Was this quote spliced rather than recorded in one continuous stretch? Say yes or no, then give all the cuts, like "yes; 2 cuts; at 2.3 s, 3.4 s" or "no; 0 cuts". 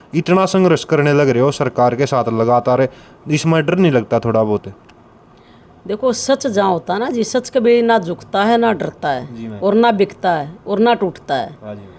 no; 0 cuts